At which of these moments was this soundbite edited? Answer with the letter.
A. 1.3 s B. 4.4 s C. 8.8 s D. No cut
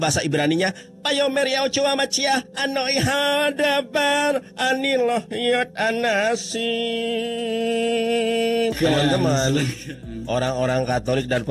C